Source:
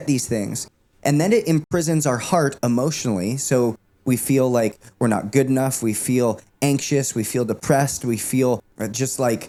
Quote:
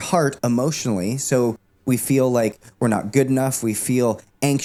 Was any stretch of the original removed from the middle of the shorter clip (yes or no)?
no